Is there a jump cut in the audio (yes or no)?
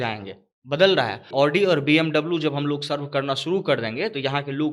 yes